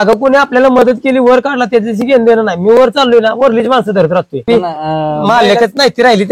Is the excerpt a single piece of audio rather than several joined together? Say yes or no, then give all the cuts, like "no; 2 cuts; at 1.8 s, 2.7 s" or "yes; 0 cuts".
no; 1 cut; at 4.4 s